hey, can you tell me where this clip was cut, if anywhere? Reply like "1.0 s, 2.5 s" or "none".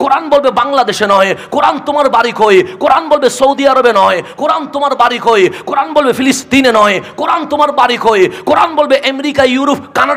none